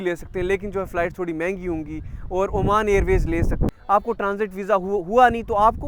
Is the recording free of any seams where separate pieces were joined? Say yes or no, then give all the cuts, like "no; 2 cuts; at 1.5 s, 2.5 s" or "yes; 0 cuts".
no; 1 cut; at 3.7 s